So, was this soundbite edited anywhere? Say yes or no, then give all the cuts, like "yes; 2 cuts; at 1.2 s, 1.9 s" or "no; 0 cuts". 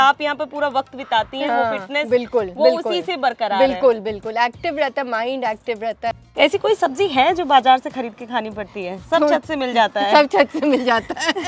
yes; 1 cut; at 6.2 s